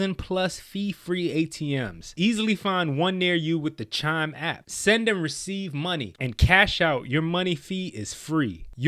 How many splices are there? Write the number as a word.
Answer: two